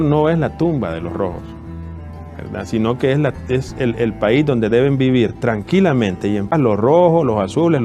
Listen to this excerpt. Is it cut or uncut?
uncut